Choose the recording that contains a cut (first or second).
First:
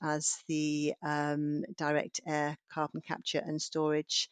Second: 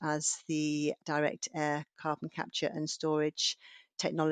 second